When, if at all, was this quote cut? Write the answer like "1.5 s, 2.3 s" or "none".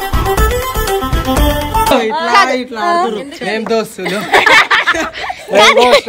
1.9 s